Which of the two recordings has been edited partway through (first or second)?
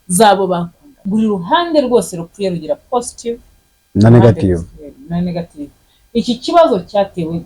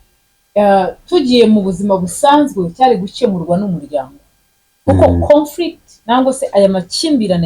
first